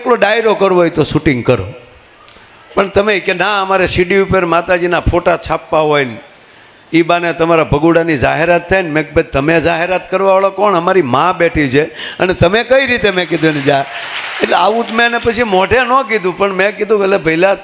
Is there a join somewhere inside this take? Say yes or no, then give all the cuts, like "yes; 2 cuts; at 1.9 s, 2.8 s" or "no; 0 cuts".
no; 0 cuts